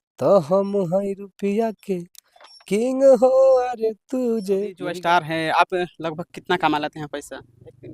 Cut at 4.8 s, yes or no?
yes